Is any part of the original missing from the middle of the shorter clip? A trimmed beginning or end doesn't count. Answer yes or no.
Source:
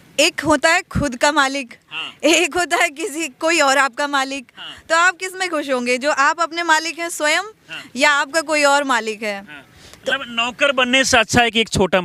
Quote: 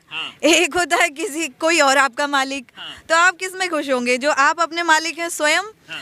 no